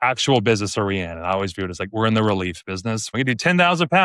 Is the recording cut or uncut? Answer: cut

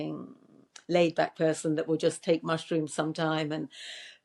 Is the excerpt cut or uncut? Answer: uncut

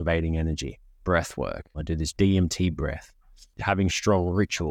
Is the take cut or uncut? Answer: cut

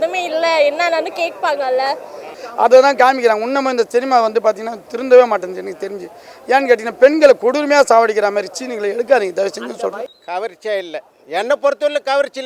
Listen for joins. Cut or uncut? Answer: cut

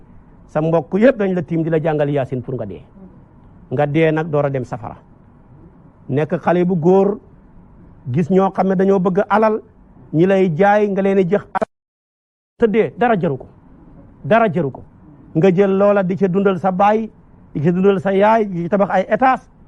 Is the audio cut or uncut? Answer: uncut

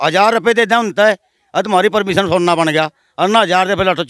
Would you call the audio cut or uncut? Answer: uncut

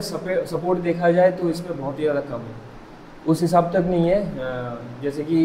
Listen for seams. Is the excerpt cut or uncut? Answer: uncut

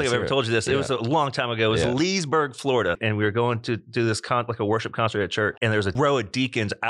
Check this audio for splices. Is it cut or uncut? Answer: cut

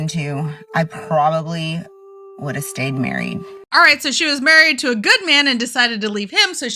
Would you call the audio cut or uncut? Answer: uncut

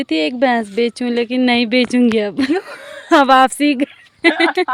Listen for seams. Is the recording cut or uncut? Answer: uncut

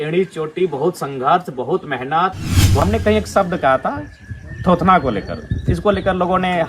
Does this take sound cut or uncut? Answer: cut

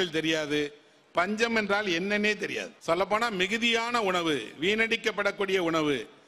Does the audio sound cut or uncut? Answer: cut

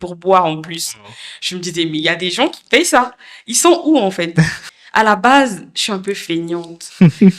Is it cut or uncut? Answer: cut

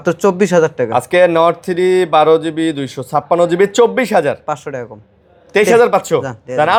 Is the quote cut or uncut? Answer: uncut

